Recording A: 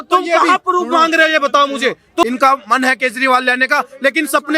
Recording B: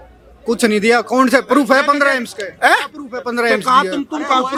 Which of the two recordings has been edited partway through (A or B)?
A